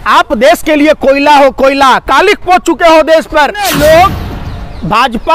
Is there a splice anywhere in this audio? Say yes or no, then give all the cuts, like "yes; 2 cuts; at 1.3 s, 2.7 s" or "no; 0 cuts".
yes; 1 cut; at 3.7 s